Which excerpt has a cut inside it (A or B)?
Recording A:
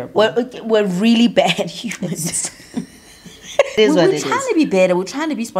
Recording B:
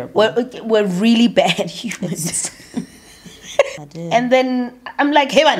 B